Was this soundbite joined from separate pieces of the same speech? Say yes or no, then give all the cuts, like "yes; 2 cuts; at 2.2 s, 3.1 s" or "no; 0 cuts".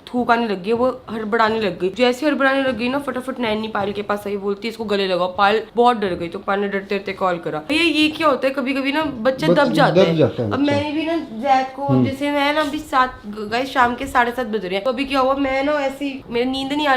no; 0 cuts